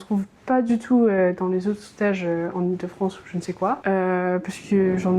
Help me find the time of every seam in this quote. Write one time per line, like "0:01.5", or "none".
0:03.8